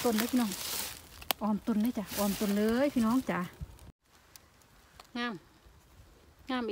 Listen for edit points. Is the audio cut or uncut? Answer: cut